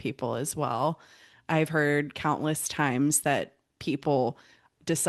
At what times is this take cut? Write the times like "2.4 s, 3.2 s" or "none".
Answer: none